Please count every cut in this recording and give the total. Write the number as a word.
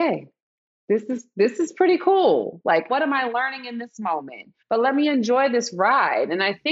two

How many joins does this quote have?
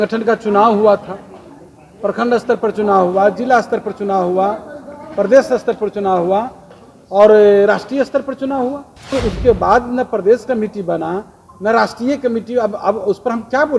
one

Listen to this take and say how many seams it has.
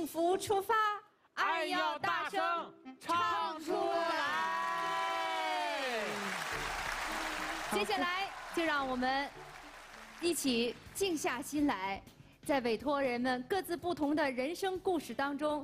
zero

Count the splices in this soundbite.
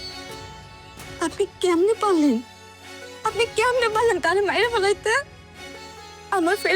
one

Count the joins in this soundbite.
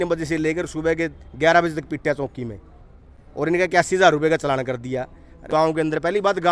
one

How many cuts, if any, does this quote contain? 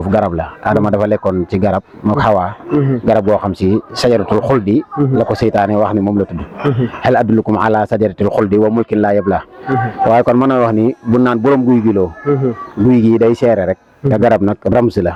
zero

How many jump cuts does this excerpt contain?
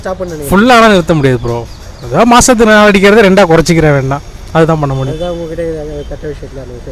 zero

